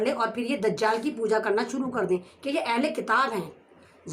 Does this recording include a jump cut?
yes; 1 cut; at 2.3 s

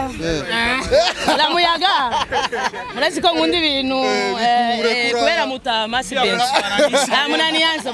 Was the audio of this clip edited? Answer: no; 0 cuts

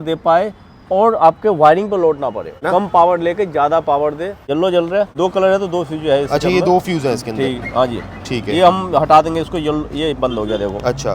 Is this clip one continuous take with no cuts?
no; 3 cuts; at 2.6 s, 4.4 s, 5.2 s

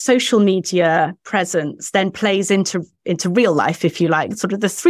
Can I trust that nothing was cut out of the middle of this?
yes; 0 cuts

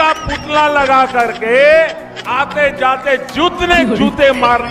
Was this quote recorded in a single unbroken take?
yes; 0 cuts

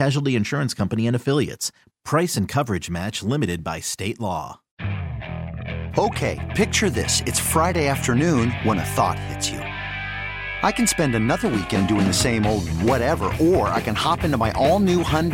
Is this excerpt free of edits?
no; 1 cut; at 4.6 s

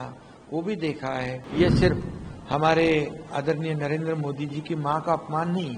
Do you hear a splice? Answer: yes; 1 cut; at 1.4 s

